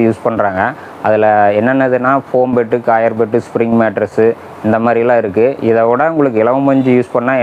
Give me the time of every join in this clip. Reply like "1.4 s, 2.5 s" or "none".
none